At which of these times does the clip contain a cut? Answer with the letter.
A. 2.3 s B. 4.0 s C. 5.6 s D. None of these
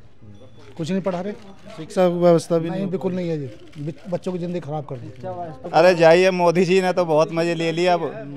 C